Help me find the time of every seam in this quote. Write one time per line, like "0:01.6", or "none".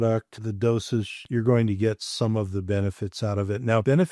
0:01.2